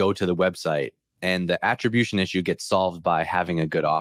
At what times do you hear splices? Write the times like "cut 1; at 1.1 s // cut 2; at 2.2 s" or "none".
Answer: none